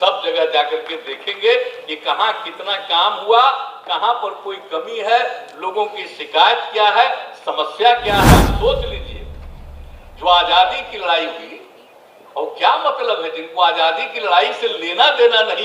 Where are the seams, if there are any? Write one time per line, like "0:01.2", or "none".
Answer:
0:08.5